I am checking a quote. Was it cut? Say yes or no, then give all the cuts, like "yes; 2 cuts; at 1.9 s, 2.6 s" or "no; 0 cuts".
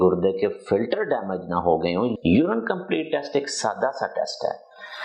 yes; 1 cut; at 2.1 s